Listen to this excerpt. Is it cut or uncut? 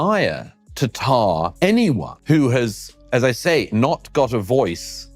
cut